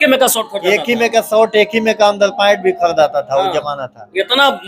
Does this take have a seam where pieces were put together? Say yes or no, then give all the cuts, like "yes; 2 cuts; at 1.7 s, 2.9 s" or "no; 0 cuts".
no; 0 cuts